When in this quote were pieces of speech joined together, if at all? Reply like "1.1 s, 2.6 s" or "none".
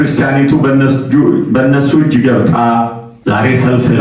3.1 s